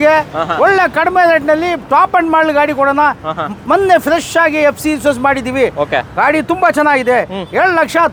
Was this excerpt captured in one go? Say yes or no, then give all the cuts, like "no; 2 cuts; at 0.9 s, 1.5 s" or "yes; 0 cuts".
yes; 0 cuts